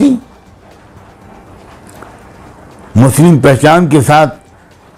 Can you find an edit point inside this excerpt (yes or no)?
no